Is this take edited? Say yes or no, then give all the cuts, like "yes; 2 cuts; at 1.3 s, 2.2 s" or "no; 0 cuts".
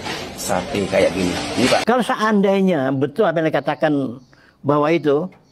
yes; 1 cut; at 1.8 s